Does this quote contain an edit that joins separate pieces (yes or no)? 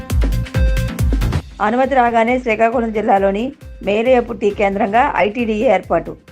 yes